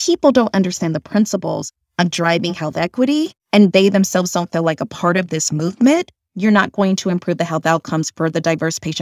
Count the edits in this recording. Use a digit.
1